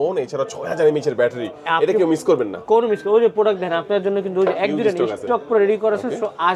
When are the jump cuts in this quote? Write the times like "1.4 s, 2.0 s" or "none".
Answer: none